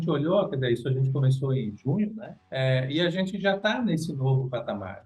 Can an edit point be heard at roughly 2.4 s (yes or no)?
yes